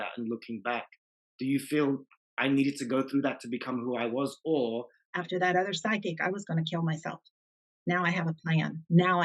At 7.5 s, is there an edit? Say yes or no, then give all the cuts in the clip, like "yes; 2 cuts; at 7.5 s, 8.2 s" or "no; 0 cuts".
no; 1 cut; at 5.0 s